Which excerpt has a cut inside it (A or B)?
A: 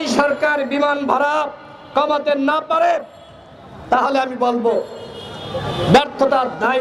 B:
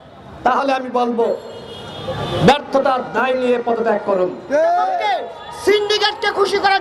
B